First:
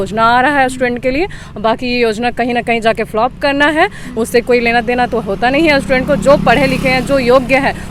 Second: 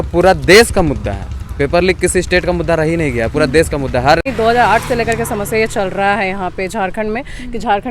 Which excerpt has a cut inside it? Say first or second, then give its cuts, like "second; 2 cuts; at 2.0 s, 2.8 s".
second; 1 cut; at 4.3 s